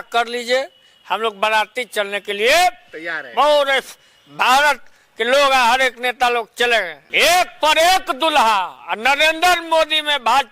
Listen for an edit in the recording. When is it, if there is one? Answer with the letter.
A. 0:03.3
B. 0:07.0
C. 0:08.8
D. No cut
B